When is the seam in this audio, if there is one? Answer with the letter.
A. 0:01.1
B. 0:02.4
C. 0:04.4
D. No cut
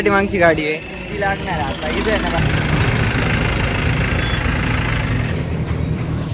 B